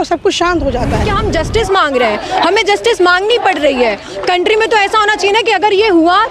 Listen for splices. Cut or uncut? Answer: cut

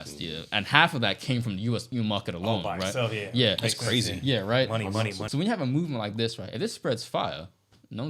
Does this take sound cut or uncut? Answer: cut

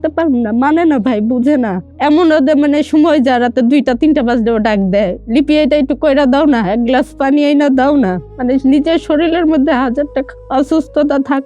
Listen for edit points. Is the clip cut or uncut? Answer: cut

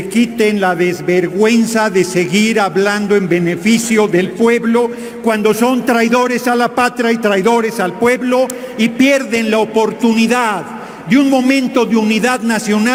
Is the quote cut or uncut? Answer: uncut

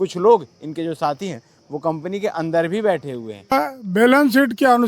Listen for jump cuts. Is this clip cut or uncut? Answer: cut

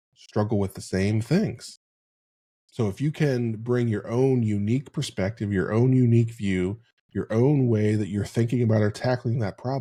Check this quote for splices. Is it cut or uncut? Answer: uncut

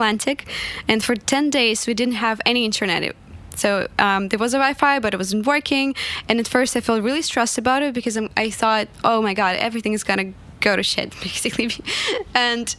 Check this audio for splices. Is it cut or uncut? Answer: uncut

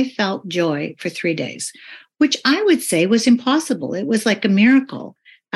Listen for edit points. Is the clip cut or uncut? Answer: uncut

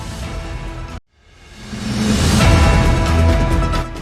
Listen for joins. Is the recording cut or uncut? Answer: cut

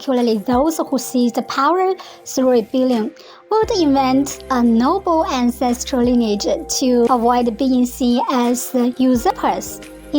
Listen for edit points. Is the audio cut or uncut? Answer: cut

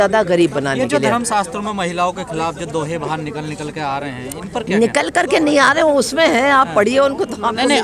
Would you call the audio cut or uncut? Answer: uncut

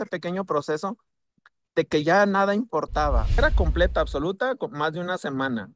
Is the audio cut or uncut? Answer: cut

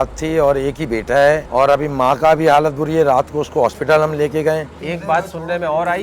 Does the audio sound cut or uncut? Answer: cut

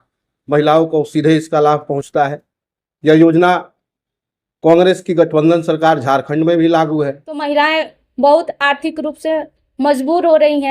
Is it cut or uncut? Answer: cut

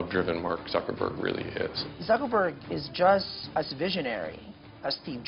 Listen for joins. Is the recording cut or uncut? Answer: cut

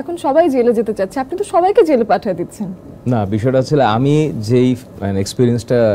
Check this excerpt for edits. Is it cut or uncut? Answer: uncut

